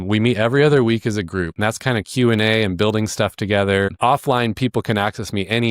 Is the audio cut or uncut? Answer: cut